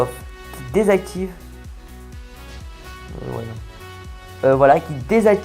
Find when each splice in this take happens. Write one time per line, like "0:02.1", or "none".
none